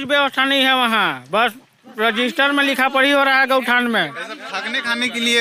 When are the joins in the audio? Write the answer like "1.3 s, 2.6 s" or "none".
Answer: none